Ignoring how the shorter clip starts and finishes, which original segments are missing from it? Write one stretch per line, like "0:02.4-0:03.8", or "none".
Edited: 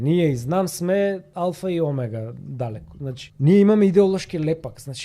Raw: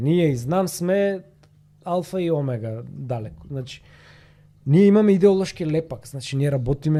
0:01.3-0:01.8
0:03.7-0:04.5